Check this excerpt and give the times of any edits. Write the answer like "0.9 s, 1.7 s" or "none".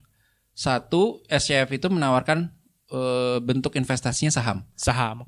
none